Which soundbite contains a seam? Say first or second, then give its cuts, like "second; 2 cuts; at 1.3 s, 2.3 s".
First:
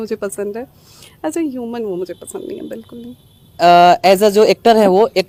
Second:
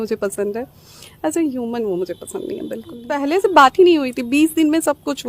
second; 1 cut; at 3.1 s